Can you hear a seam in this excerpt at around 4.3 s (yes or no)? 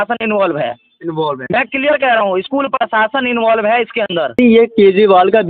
yes